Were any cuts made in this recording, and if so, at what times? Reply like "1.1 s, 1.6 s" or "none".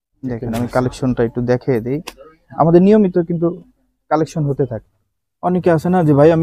4.8 s